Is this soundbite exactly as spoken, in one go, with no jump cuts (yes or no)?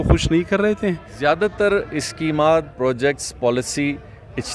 no